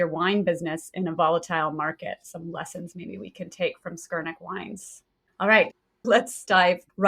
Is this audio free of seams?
no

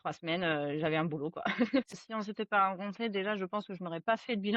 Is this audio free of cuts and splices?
no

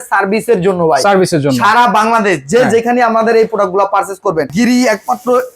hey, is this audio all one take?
no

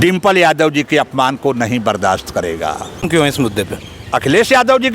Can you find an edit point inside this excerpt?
yes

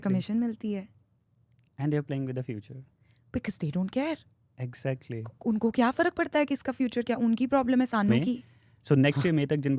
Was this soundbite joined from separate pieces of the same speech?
yes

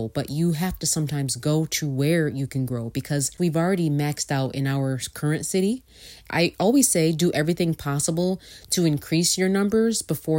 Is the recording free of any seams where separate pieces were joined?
no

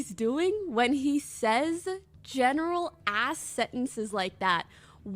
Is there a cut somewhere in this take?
no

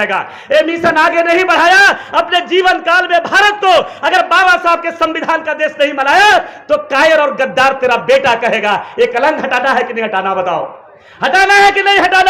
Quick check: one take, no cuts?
yes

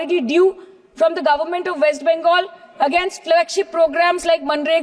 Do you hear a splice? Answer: no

